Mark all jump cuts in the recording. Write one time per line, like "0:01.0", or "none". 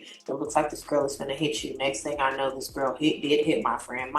none